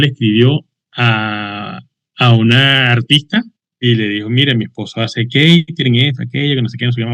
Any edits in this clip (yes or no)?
no